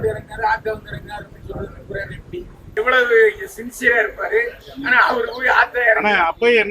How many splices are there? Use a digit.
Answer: 1